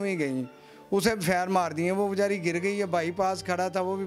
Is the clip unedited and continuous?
yes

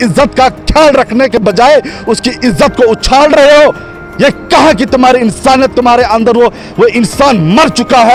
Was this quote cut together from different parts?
no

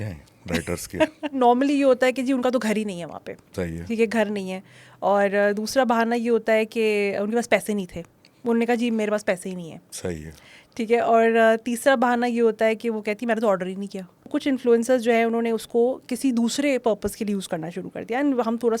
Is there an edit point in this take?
yes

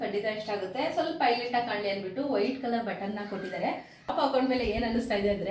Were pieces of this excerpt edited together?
yes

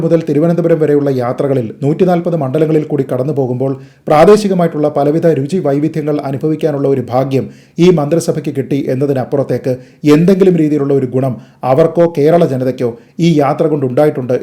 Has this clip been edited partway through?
no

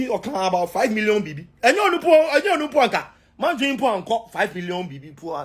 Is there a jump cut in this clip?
no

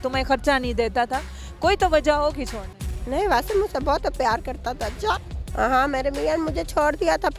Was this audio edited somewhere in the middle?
yes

